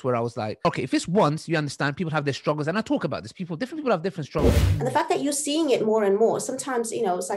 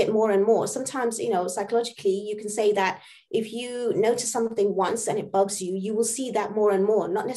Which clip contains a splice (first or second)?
first